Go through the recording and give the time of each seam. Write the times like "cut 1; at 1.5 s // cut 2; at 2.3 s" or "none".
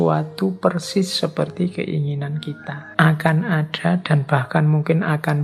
cut 1; at 2.8 s